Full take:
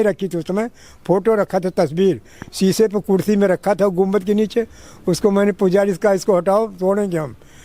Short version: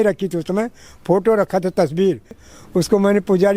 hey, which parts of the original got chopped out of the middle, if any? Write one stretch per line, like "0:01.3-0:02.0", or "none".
0:02.5-0:04.8

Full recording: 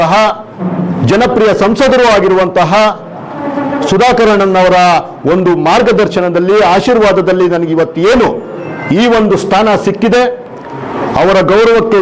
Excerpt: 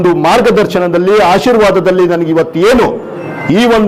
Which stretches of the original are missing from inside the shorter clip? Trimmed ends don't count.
none

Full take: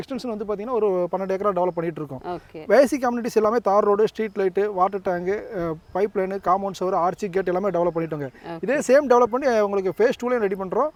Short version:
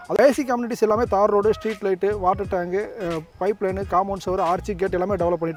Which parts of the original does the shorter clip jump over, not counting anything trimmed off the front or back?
none

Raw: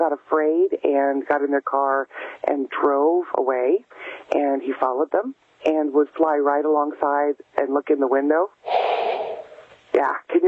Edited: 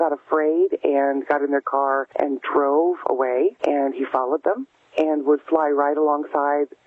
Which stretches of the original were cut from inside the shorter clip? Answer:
0:02.1-0:02.4
0:03.9-0:04.2

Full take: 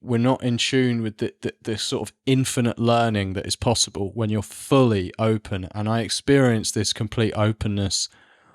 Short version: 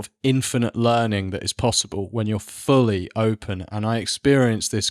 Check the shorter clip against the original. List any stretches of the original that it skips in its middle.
none

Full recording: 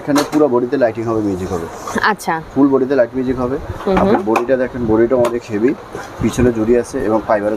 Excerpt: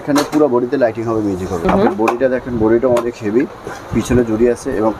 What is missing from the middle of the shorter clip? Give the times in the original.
0:01.7-0:03.9

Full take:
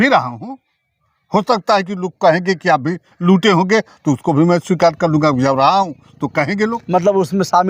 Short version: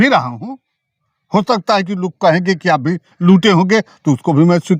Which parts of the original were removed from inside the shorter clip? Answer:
none

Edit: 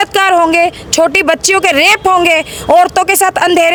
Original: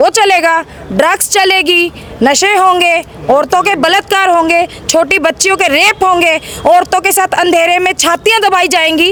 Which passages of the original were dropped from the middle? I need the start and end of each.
none

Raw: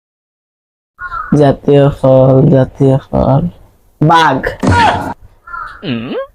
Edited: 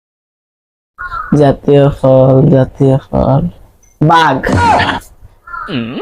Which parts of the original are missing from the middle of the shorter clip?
0:04.4-0:04.6

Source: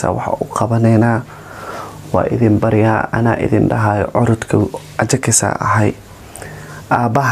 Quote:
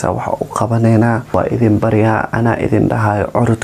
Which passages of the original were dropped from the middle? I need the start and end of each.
0:01.2-0:02.0

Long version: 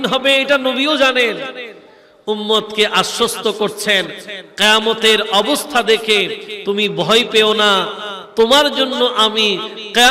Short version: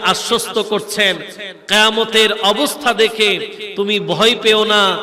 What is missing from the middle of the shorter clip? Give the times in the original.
none

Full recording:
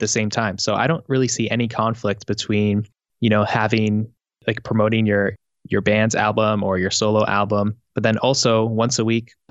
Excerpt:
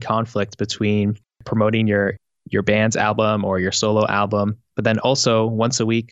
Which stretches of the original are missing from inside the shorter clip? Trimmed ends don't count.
0:03.1-0:04.6

